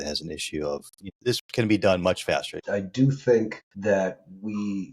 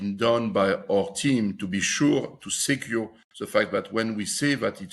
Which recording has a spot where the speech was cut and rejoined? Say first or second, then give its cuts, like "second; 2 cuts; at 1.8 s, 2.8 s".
first; 3 cuts; at 1.0 s, 2.6 s, 3.6 s